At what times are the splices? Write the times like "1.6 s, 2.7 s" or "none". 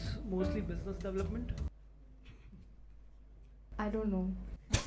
1.7 s